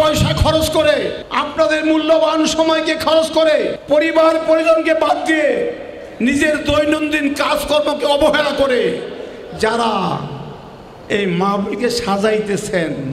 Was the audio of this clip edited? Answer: yes; 2 cuts; at 1.5 s, 3.6 s

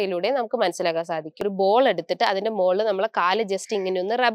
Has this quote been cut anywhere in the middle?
yes; 1 cut; at 1.4 s

